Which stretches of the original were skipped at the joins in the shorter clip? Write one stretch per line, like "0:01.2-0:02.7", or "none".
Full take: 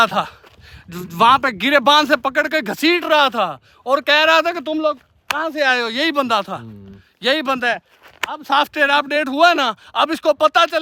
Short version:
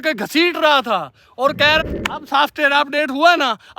0:04.3-0:08.0